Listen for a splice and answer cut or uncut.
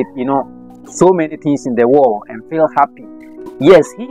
uncut